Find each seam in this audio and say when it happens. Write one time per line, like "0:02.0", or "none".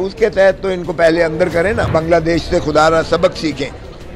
0:01.9